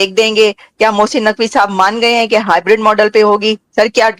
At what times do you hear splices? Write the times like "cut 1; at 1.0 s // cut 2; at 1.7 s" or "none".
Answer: none